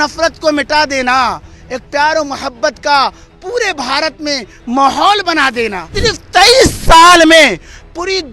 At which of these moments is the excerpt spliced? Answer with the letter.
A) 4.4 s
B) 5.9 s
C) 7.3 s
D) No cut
B